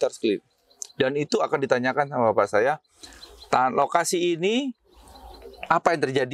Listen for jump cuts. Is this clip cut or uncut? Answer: uncut